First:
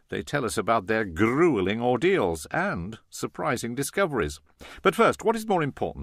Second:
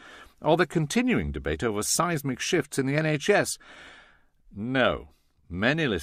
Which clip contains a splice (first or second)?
first